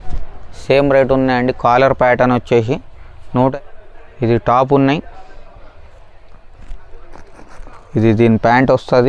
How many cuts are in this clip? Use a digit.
1